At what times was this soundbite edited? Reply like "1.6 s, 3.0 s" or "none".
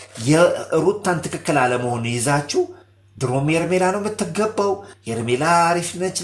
none